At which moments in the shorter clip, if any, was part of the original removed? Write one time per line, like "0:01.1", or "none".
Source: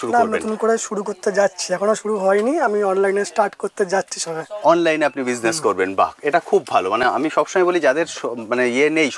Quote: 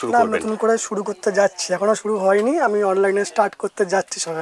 none